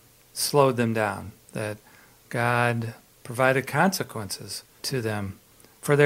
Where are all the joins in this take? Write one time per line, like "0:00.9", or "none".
0:04.8